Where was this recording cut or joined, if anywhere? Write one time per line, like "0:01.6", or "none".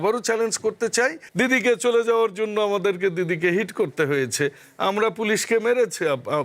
0:01.2